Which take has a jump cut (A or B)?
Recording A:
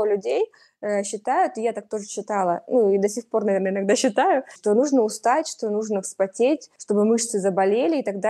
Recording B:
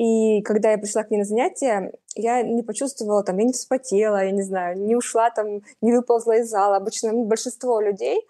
A